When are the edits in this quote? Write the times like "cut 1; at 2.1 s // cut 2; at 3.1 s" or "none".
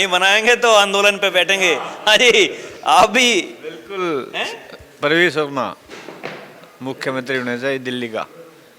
none